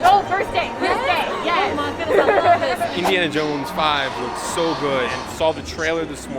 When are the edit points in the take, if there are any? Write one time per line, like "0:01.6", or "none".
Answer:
0:03.0
0:05.2